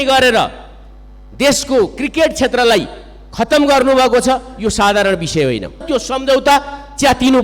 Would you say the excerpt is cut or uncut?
cut